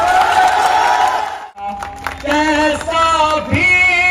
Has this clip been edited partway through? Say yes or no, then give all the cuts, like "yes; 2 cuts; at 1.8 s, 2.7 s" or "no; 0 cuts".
yes; 1 cut; at 1.7 s